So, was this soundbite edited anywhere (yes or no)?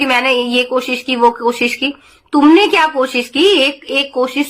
no